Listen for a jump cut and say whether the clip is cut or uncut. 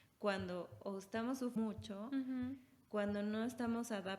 cut